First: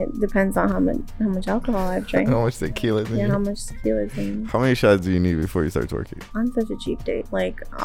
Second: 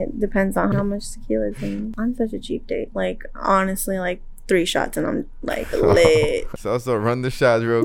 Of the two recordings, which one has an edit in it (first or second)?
second